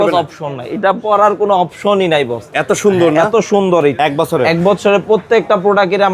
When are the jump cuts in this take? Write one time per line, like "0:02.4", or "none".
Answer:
0:04.0

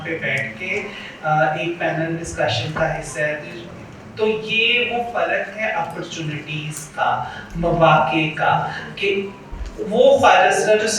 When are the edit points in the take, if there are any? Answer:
none

